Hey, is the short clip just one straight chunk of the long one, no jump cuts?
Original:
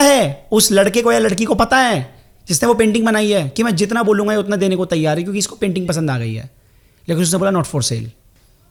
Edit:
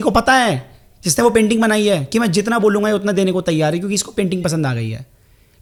yes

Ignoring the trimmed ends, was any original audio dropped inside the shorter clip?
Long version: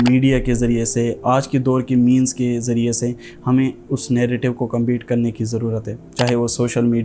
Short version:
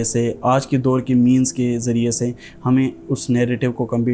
no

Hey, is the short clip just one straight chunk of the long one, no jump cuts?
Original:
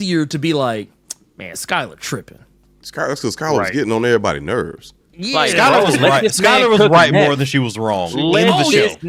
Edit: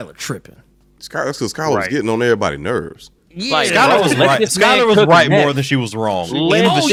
yes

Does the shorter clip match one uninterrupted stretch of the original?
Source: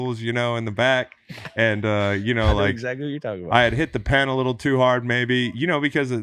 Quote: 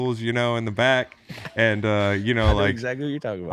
yes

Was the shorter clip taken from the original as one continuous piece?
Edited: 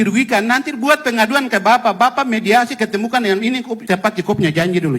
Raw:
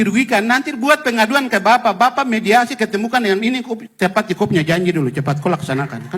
no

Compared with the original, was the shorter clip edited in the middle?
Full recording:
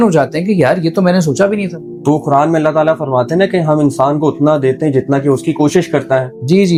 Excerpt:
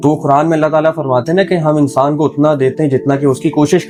no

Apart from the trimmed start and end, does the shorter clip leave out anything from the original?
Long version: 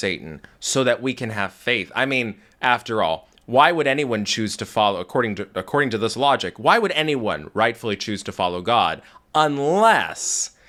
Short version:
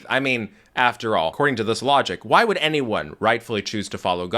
yes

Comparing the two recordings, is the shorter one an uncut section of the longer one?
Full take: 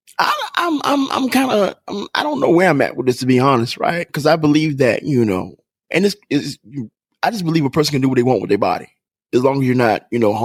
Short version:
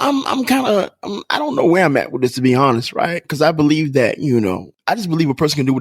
no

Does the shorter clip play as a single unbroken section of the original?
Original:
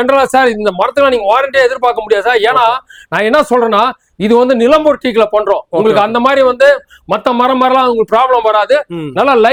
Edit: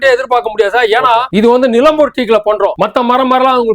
no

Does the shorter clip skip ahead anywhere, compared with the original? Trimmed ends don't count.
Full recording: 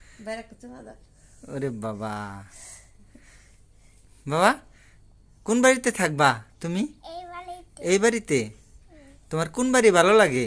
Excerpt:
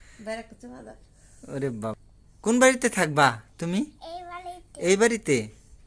yes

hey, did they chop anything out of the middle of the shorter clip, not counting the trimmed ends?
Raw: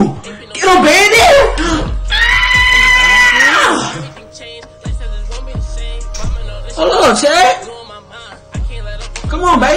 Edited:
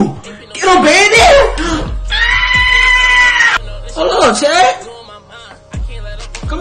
yes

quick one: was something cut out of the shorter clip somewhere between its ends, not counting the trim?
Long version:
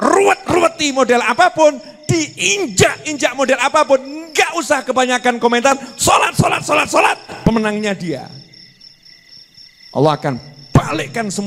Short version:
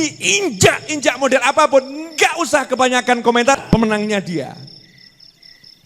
yes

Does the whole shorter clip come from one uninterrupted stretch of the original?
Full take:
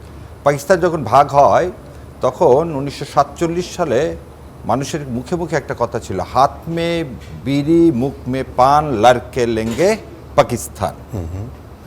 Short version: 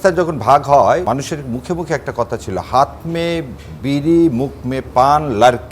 no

